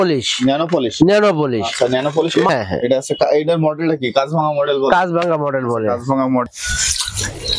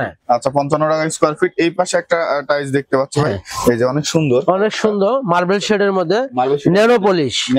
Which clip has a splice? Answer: first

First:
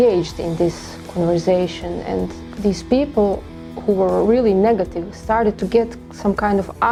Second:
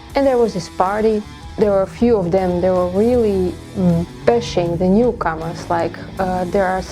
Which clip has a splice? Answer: second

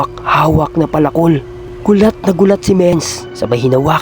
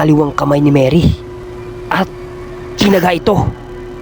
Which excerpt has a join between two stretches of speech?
first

